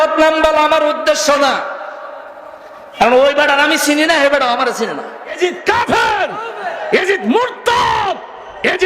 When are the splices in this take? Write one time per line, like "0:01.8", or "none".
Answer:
0:05.4

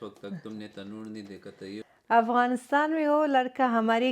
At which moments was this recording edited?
0:01.8

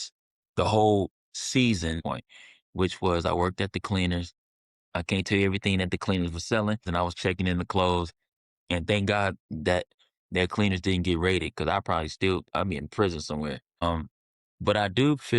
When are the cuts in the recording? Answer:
0:02.0
0:06.9
0:13.8

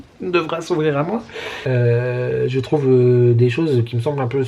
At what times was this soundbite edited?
0:01.5

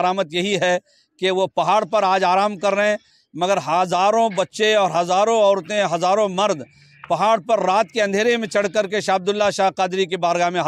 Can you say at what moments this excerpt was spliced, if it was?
none

